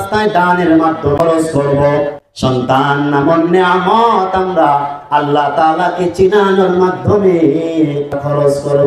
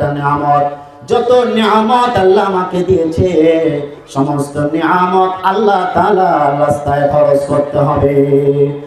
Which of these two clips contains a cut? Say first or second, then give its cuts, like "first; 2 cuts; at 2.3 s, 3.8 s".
first; 2 cuts; at 1.2 s, 2.2 s